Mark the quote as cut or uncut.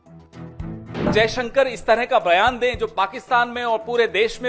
cut